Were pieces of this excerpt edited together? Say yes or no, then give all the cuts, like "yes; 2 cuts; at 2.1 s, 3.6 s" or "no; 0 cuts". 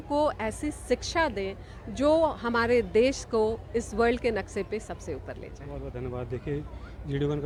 no; 0 cuts